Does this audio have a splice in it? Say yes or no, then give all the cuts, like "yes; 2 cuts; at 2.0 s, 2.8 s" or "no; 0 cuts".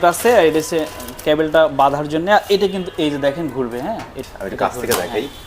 no; 0 cuts